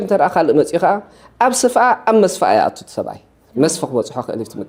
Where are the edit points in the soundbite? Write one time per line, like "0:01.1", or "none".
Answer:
none